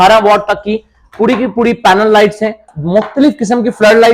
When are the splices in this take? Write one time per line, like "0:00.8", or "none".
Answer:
0:02.7